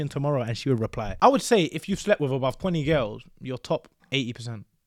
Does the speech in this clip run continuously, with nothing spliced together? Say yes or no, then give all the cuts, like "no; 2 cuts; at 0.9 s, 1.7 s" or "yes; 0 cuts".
no; 3 cuts; at 1.0 s, 2.6 s, 4.0 s